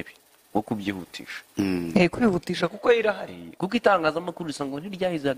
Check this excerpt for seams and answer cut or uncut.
uncut